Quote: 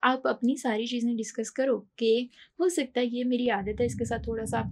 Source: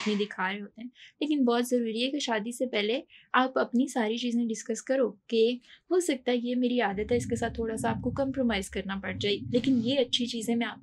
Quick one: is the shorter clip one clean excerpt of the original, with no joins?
yes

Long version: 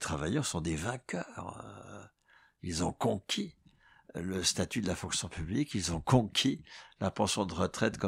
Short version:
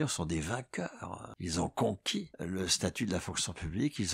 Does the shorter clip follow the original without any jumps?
no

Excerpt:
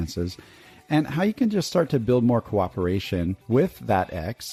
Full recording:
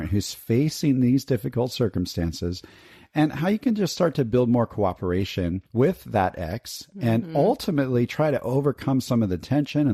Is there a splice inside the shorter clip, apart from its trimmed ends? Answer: no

